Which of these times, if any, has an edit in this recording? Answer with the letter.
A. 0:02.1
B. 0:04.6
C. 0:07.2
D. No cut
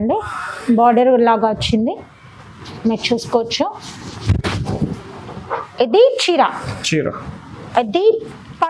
D